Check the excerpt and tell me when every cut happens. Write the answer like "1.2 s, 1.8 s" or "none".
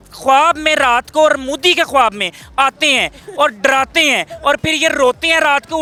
none